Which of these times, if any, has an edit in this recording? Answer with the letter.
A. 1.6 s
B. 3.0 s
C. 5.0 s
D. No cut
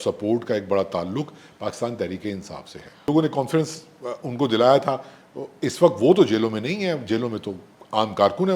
B